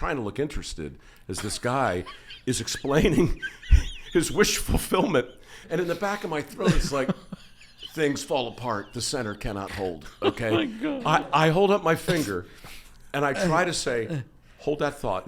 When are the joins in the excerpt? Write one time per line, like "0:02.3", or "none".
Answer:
0:05.6
0:11.0